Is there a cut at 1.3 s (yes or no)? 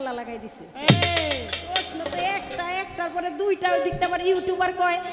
no